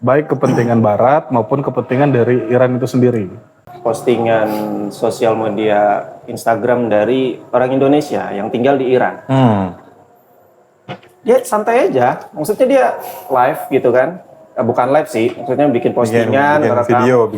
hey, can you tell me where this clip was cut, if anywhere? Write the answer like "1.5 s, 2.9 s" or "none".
3.7 s